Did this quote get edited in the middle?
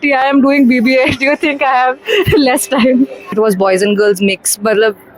yes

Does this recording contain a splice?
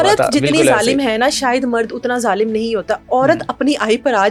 no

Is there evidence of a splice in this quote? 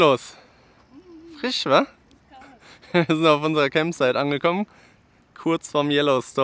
no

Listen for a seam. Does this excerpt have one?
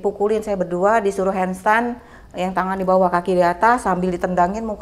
no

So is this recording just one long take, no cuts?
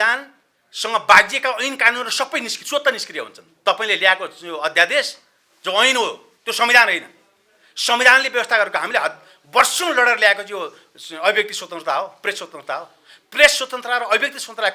no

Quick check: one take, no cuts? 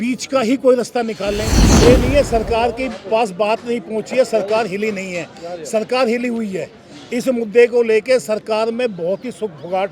no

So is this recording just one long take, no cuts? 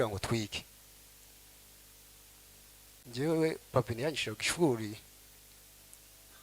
no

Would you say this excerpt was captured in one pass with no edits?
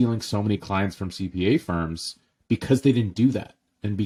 yes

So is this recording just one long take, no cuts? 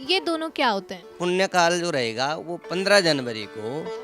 no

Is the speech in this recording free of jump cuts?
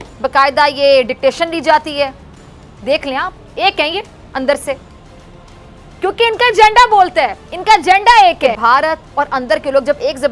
no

